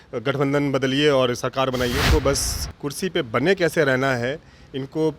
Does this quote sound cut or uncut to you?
cut